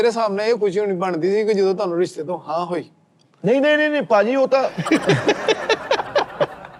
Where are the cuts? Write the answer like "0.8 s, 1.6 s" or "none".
none